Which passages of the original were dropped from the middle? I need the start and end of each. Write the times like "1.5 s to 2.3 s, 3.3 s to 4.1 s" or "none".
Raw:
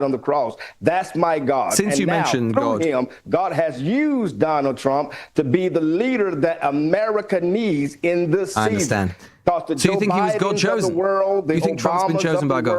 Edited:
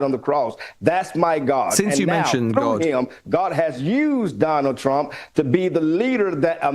none